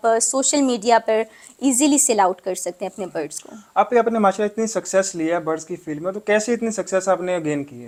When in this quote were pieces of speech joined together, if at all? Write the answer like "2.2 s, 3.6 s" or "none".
none